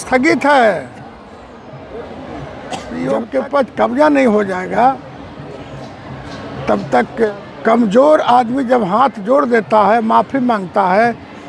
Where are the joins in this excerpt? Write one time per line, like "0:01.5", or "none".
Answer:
0:02.9
0:07.3